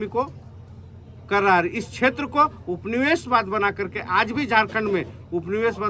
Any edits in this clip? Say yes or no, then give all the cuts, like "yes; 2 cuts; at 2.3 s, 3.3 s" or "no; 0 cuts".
no; 0 cuts